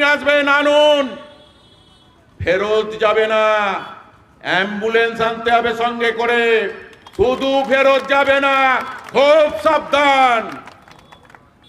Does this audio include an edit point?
no; 0 cuts

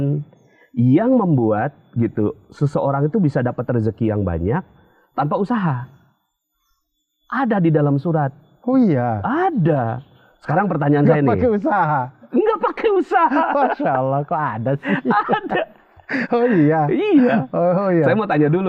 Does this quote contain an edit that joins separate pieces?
no; 0 cuts

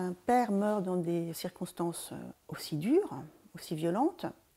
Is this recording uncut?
no; 1 cut; at 2.3 s

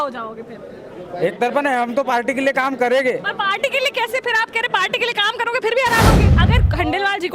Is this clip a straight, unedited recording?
no; 1 cut; at 6.3 s

